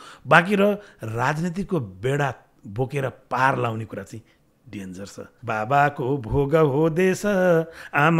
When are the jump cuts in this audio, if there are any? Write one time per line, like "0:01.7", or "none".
0:05.3